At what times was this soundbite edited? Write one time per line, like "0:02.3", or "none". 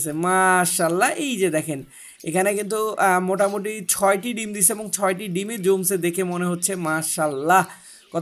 none